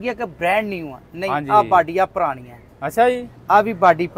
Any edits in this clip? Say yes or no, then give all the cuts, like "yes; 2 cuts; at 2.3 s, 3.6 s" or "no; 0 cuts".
no; 0 cuts